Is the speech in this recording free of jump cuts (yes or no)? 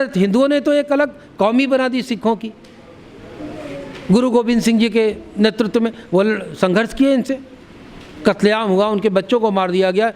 yes